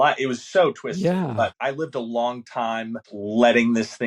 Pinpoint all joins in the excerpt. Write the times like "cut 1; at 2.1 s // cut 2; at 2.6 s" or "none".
cut 1; at 1.6 s // cut 2; at 3.1 s

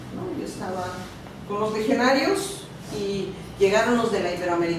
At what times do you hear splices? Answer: cut 1; at 2.7 s

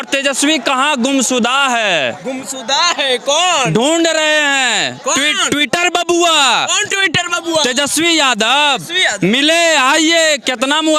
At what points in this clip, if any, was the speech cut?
none

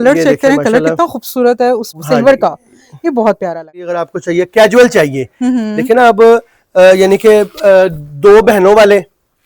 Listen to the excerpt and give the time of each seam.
cut 1; at 1.9 s // cut 2; at 4.1 s

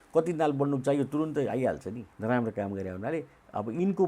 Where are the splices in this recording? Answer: cut 1; at 2.1 s

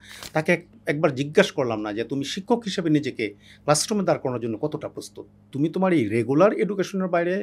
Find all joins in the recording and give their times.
cut 1; at 5.4 s

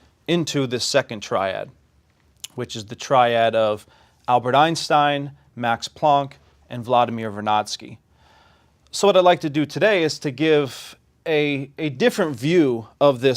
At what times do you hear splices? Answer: cut 1; at 3.8 s

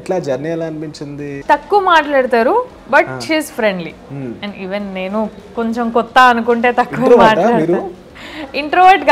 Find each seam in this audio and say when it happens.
cut 1; at 1.3 s

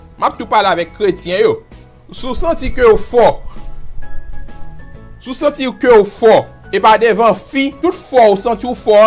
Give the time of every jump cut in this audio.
cut 1; at 7.7 s

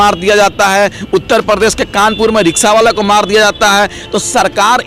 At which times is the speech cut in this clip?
none

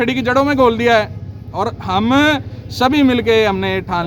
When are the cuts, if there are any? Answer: none

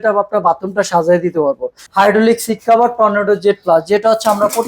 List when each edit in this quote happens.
cut 1; at 1.8 s

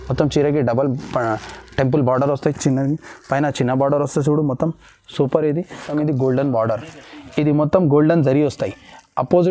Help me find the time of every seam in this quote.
cut 1; at 5.9 s

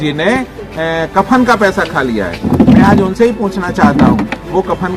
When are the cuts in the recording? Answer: none

